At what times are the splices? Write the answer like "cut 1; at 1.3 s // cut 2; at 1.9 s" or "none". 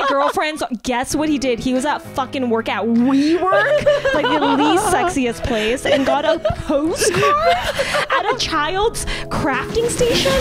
none